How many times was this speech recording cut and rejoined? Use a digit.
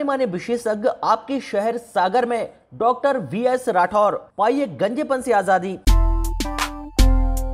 1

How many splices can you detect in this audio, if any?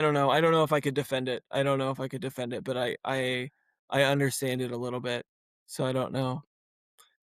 0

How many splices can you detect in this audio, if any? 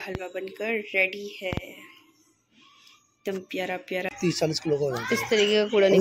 1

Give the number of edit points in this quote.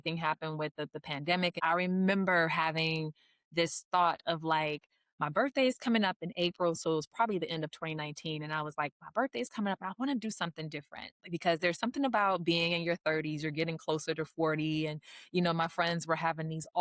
1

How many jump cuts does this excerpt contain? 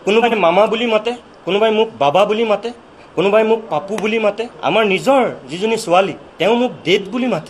2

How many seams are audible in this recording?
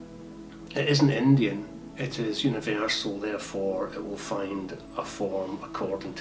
0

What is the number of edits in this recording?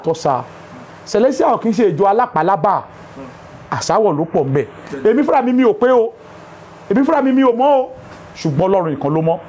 0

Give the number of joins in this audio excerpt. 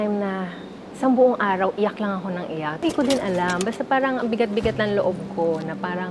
1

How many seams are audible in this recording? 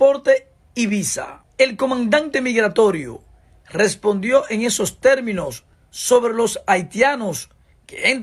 1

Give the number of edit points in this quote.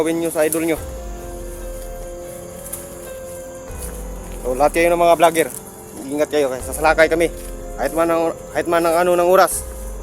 2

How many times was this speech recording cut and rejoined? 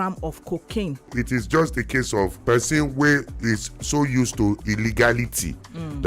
2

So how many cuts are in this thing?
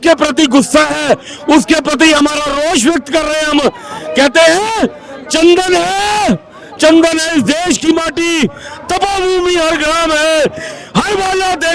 0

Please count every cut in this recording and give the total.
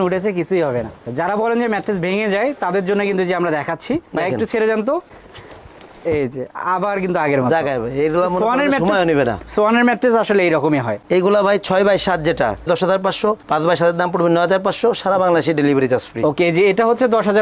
0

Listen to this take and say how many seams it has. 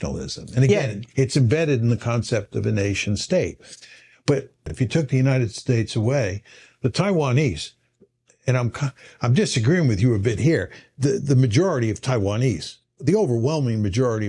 1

